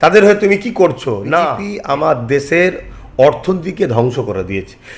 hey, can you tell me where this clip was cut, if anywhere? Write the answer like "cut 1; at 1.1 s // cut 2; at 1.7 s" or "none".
cut 1; at 1.7 s